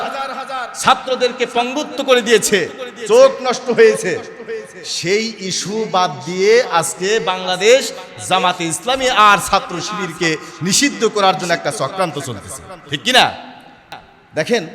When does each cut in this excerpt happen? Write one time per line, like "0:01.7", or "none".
none